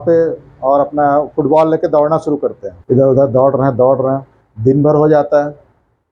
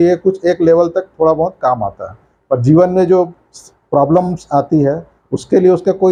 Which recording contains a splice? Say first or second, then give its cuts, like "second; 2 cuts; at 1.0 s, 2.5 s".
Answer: first; 1 cut; at 2.7 s